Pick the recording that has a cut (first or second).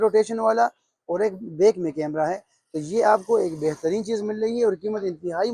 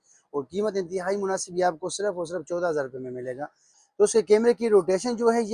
second